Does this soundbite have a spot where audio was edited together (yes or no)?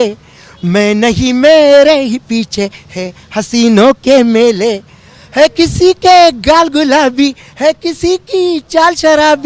no